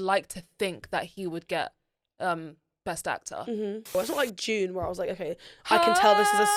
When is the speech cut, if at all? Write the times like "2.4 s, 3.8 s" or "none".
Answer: 3.9 s